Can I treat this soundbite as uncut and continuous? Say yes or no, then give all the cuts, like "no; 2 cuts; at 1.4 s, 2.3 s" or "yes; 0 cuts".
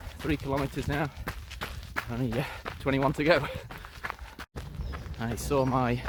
yes; 0 cuts